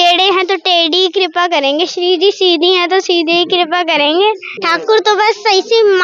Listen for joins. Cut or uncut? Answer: cut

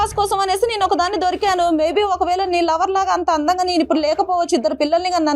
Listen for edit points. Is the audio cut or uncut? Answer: uncut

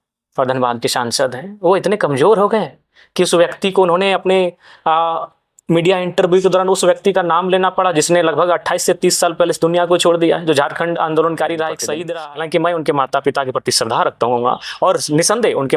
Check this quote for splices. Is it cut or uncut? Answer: cut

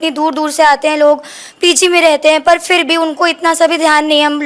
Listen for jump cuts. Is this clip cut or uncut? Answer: uncut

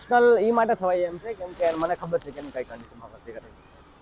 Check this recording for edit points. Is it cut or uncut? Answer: uncut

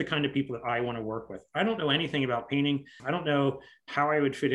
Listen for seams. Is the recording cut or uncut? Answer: cut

